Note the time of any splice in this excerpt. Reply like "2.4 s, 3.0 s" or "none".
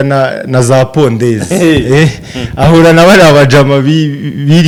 none